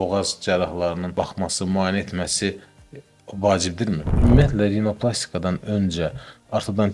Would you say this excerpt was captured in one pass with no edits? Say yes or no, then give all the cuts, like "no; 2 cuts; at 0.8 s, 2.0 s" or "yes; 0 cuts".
no; 2 cuts; at 1.1 s, 4.1 s